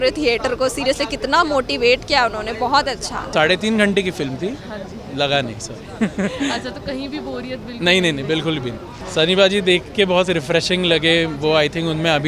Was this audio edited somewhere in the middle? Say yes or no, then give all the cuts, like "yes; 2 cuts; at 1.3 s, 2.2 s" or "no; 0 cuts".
yes; 2 cuts; at 3.3 s, 8.9 s